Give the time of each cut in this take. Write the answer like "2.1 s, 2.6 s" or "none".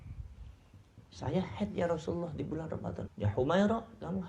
3.1 s